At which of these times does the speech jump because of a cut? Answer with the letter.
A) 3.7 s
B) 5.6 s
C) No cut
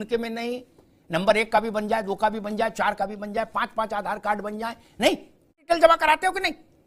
B